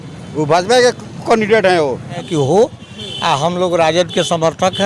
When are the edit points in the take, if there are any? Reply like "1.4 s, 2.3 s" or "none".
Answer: 2.2 s